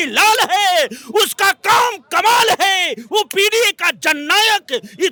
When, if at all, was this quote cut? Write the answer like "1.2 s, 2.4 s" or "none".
none